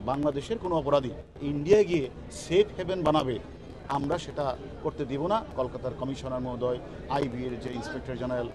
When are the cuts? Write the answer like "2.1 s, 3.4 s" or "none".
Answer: 1.4 s, 5.5 s